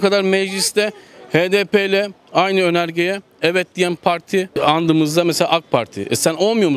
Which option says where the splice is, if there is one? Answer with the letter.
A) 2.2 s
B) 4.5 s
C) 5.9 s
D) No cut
B